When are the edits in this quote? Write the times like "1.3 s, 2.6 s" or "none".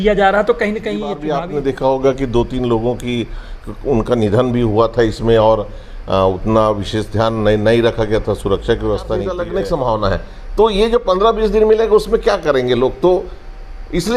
1.2 s, 9.3 s